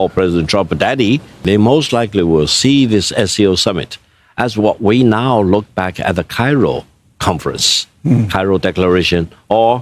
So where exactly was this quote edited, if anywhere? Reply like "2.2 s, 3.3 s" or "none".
1.4 s